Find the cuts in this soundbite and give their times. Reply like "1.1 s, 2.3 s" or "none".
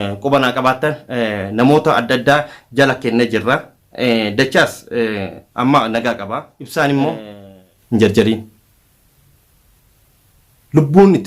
6.6 s